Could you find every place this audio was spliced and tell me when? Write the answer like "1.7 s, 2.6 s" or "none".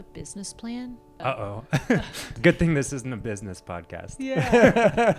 1.2 s, 2.3 s